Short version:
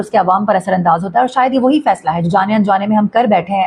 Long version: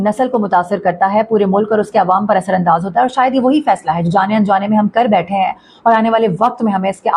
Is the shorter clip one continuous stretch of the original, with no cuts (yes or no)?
yes